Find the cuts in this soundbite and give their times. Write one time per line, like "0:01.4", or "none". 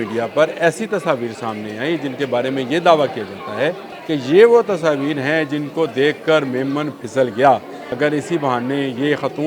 0:03.9
0:07.8